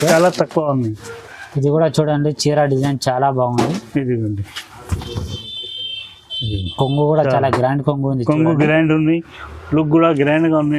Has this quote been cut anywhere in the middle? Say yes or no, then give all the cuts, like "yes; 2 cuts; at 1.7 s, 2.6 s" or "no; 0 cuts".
no; 0 cuts